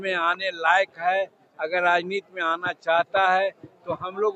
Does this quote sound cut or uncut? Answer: uncut